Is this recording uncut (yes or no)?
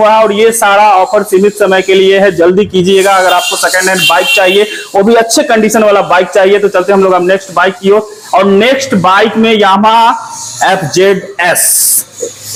yes